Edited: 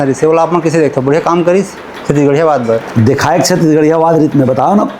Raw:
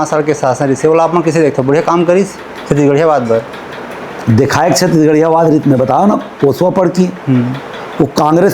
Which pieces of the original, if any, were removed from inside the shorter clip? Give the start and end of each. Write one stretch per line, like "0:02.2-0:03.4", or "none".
0:03.5-0:04.2